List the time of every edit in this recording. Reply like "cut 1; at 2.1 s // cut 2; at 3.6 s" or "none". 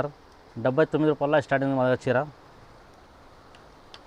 none

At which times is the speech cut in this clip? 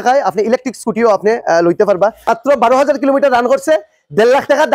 cut 1; at 2.2 s

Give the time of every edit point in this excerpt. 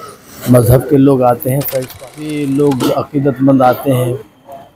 cut 1; at 2.2 s

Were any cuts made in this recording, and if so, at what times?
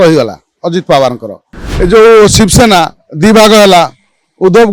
cut 1; at 1.6 s

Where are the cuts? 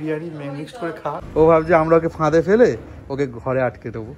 cut 1; at 1.2 s

